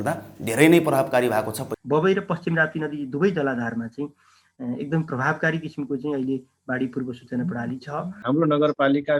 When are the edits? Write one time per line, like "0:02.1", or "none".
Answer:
0:01.6
0:08.1